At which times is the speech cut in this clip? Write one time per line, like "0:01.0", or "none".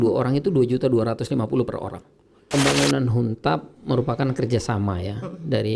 0:02.5

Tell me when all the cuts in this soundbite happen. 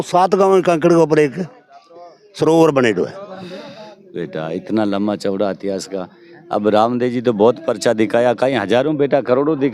0:03.3

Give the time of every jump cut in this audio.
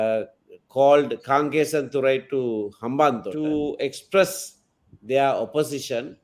0:03.3

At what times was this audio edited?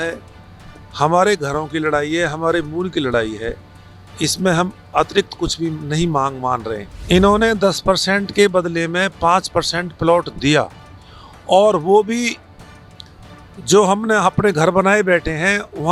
0:06.9

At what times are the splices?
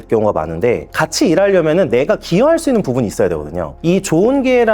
0:03.7

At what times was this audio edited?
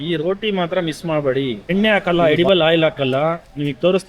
0:01.6

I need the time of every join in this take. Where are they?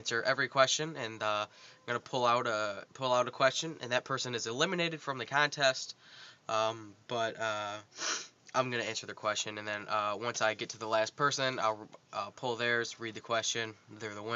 0:11.6

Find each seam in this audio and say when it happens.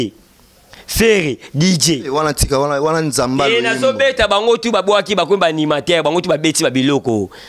none

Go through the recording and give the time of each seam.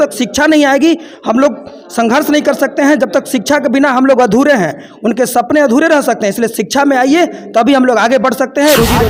none

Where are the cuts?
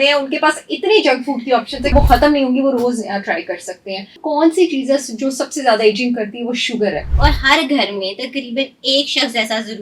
0:01.9
0:04.2
0:07.1

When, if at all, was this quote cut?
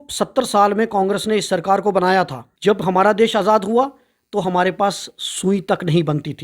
0:02.4

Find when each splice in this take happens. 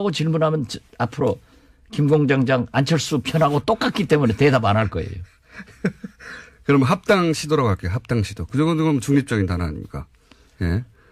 0:06.6

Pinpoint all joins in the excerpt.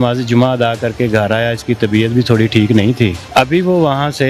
0:03.2

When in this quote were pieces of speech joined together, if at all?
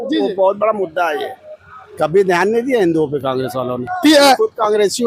none

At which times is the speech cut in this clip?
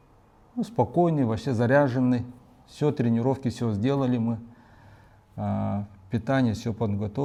none

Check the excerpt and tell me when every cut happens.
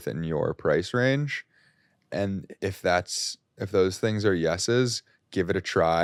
none

